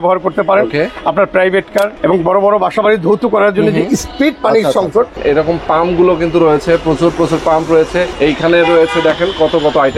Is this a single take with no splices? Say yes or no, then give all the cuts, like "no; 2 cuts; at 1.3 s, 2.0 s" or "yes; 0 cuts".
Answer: no; 3 cuts; at 1.9 s, 5.2 s, 8.1 s